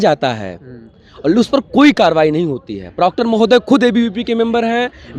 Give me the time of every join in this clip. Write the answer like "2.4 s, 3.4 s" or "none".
none